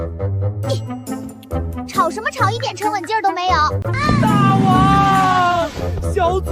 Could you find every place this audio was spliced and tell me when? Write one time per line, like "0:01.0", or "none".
0:03.9